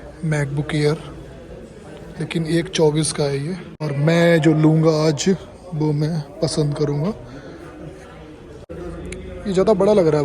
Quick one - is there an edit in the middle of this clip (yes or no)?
yes